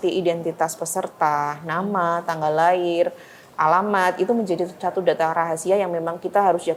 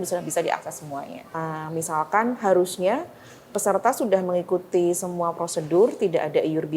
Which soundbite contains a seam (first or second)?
second